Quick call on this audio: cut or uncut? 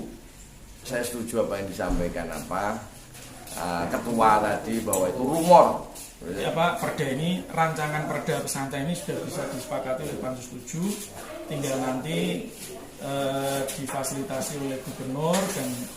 cut